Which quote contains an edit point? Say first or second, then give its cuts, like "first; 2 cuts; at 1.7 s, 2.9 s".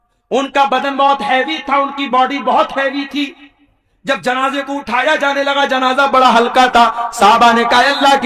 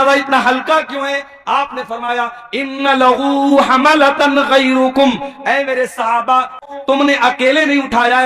second; 1 cut; at 6.7 s